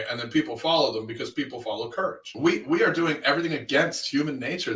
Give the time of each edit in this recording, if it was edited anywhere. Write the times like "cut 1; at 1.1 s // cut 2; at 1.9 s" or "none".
cut 1; at 2.2 s